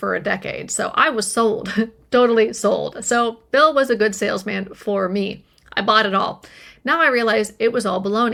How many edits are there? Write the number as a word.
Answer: zero